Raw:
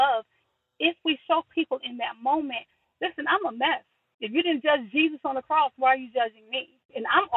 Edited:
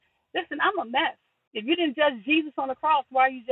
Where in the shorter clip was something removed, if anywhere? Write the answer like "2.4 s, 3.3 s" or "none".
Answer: none